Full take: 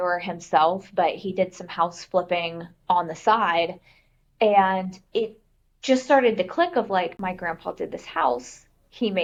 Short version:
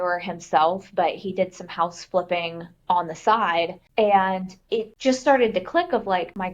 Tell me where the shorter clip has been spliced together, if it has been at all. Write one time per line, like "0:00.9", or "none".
0:03.8
0:04.9